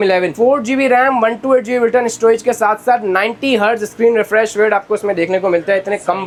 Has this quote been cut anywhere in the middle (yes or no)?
no